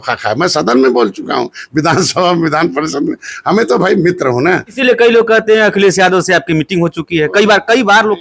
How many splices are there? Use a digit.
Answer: 1